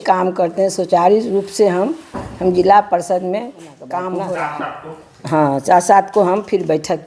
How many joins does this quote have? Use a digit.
1